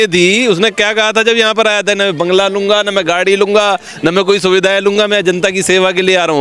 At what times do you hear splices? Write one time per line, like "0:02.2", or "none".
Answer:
none